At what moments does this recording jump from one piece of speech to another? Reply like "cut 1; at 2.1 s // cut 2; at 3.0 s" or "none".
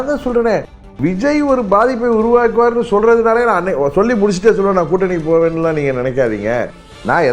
none